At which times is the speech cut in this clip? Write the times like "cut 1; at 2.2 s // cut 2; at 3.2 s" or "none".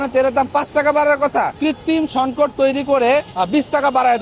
cut 1; at 1.5 s // cut 2; at 3.3 s